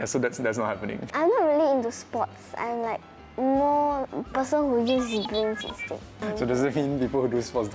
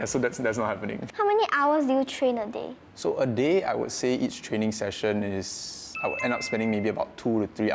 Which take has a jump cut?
first; 3 cuts; at 1.0 s, 4.1 s, 6.2 s

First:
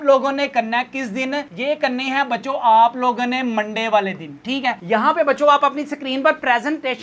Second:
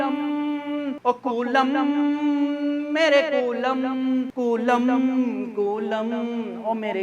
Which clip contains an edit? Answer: first; 1 cut; at 4.8 s

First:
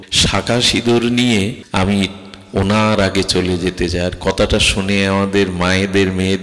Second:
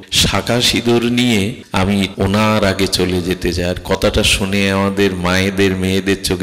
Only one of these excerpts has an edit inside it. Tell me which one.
second; 1 cut; at 2.1 s

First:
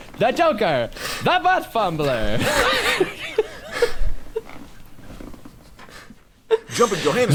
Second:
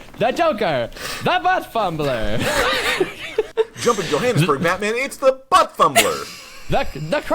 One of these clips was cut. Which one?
second; 1 cut; at 3.5 s

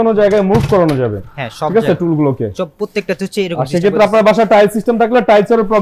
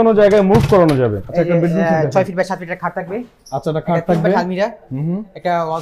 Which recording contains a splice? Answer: second; 1 cut; at 1.2 s

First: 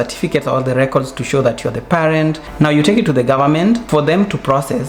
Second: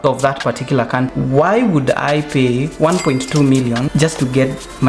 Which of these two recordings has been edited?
second; 2 cuts; at 1.1 s, 3.9 s

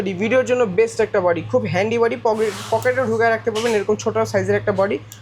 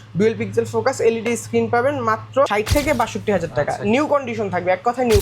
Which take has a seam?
second; 1 cut; at 2.5 s

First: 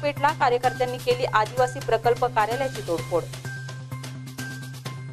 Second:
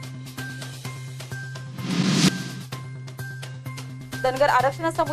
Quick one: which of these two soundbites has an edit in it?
second; 1 cut; at 1.0 s

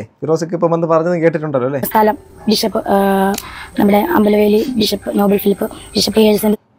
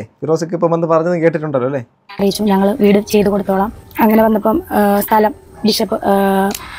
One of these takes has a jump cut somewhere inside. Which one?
first; 1 cut; at 1.9 s

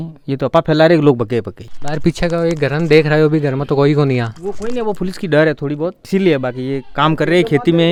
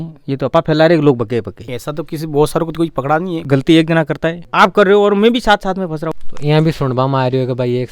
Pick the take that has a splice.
second; 4 cuts; at 1.8 s, 3.4 s, 4.4 s, 6.1 s

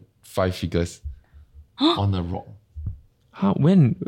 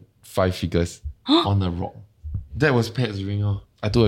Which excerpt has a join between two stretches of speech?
second; 2 cuts; at 1.1 s, 2.5 s

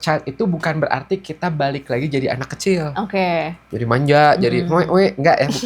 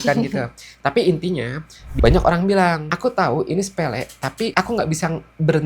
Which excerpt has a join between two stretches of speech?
second; 3 cuts; at 1.8 s, 2.9 s, 4.5 s

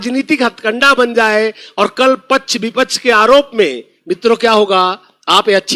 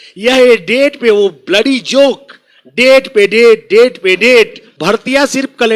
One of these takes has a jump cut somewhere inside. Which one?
second; 1 cut; at 4.7 s

